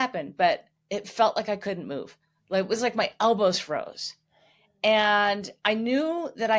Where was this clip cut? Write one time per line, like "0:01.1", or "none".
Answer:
none